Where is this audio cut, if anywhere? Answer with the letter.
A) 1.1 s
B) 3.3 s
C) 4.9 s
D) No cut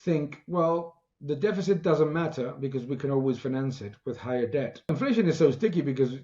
C